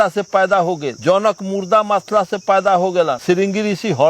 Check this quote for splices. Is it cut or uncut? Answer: cut